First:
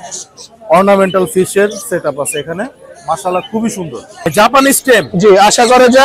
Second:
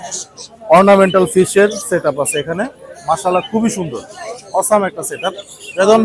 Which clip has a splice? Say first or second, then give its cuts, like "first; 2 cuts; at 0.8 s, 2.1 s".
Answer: first; 1 cut; at 4.2 s